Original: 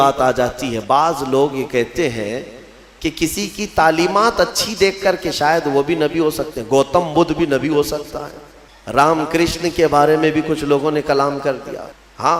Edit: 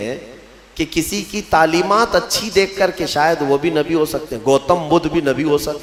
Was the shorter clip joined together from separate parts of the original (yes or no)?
no